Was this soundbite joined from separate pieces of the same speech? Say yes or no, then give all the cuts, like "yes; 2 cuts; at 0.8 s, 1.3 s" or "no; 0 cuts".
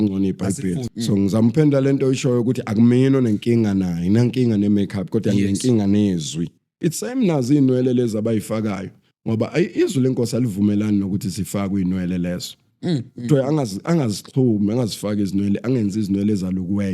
yes; 2 cuts; at 0.9 s, 6.7 s